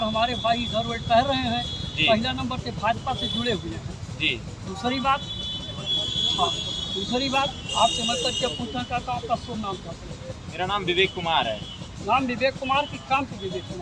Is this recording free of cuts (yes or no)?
yes